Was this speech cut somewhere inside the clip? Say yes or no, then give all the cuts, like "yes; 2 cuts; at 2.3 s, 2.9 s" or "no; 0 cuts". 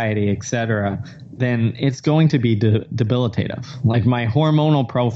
no; 0 cuts